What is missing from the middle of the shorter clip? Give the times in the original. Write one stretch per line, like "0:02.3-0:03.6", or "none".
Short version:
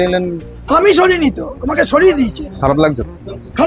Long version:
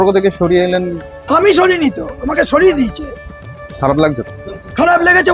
0:03.0-0:03.6